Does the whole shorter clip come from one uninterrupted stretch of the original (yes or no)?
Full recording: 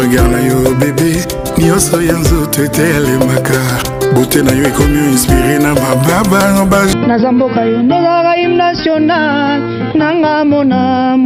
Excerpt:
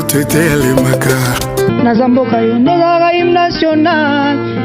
no